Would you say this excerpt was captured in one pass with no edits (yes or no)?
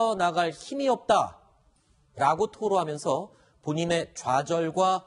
no